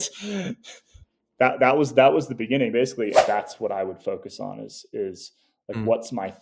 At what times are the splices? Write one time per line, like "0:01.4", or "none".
0:03.2